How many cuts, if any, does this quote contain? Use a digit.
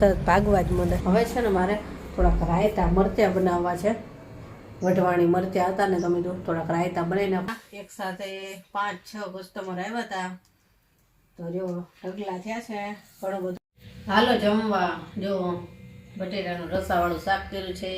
3